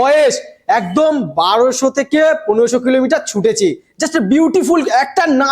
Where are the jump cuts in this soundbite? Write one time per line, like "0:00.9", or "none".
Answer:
none